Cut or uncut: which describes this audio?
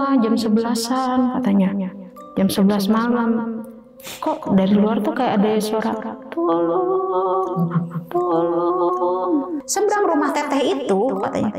cut